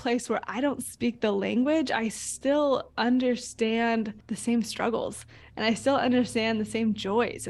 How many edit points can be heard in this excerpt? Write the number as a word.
one